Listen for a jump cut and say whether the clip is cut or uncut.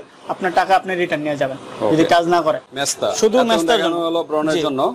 cut